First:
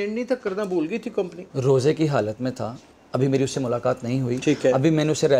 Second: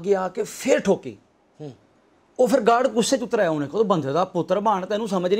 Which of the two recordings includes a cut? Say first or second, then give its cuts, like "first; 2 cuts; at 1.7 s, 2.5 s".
first; 1 cut; at 1.4 s